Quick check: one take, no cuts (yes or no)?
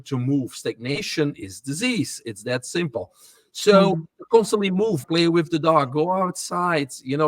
no